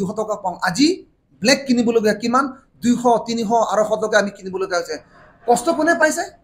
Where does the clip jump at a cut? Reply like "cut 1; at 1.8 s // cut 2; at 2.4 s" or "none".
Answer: none